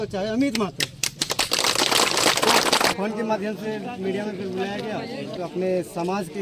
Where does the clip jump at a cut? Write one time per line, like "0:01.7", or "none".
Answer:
0:02.9
0:05.3